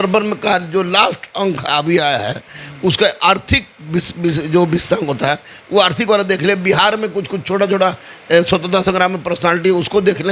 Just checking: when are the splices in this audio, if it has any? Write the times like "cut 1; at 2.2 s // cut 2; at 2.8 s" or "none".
none